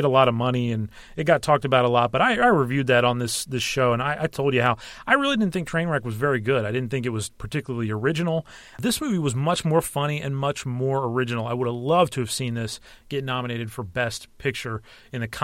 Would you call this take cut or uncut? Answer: cut